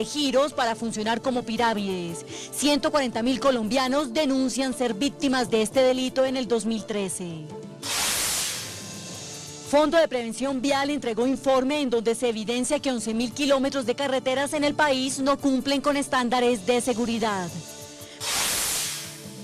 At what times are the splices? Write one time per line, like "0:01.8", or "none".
0:09.4